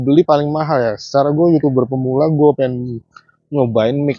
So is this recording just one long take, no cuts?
yes; 0 cuts

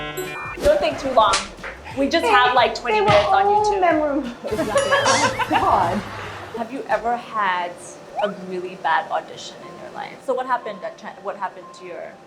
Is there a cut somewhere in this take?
yes; 2 cuts; at 6.5 s, 10.1 s

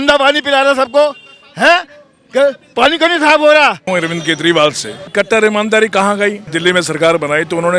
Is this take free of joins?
no; 3 cuts; at 3.9 s, 5.1 s, 6.5 s

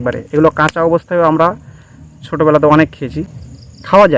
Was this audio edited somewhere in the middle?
no; 0 cuts

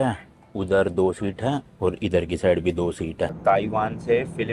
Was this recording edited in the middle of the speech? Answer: yes; 1 cut; at 3.4 s

